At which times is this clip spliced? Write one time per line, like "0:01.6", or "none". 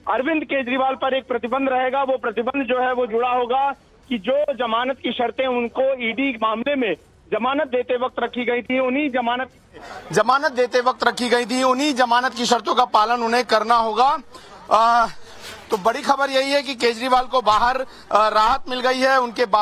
0:13.5